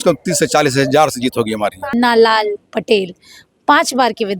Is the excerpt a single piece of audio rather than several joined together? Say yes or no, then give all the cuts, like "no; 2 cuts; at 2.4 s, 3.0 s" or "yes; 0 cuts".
no; 1 cut; at 1.9 s